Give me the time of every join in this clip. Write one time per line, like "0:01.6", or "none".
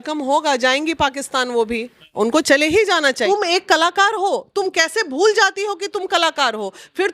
0:03.3